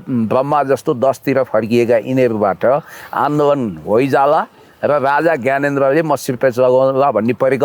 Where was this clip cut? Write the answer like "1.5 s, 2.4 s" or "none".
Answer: none